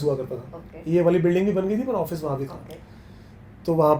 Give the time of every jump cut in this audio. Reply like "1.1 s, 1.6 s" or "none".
none